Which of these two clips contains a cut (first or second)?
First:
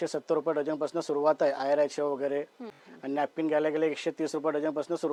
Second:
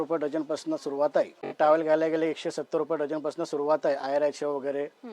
second